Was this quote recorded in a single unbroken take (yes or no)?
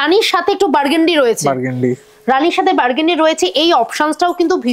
yes